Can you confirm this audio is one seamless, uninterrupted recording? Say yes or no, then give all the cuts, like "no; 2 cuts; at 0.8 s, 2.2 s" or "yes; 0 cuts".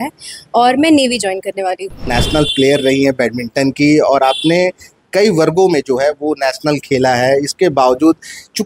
no; 1 cut; at 2.0 s